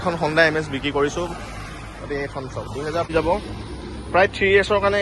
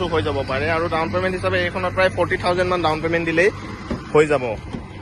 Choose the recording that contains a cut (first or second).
first